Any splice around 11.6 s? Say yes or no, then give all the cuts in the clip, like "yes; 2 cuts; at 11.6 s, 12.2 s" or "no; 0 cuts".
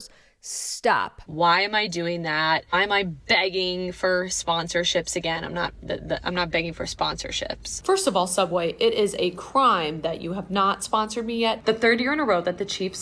yes; 3 cuts; at 1.2 s, 7.7 s, 11.6 s